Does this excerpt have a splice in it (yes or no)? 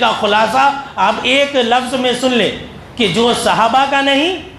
no